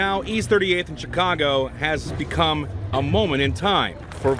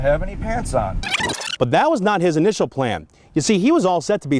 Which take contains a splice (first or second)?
second